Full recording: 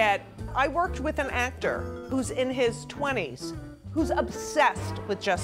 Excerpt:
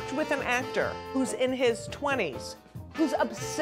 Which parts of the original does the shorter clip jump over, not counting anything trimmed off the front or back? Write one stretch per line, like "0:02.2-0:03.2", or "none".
0:01.9-0:02.0